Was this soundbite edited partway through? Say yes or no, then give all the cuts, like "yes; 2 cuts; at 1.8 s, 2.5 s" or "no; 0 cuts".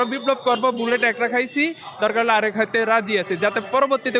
no; 0 cuts